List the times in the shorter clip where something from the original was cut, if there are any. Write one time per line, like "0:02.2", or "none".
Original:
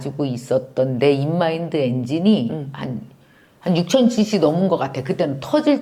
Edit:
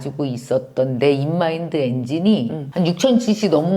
0:02.6